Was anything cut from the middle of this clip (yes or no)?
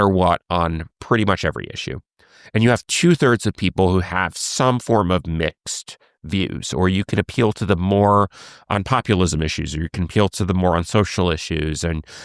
no